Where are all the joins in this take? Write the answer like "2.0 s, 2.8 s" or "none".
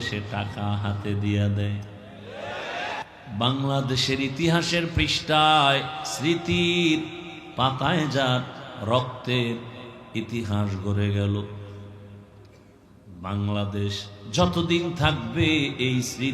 3.0 s